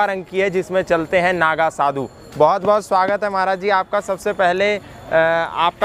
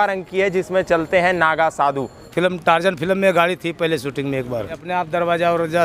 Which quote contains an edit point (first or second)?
second